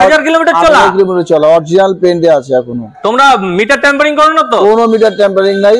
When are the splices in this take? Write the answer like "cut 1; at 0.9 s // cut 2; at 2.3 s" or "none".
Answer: none